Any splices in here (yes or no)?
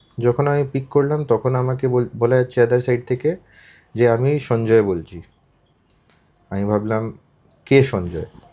no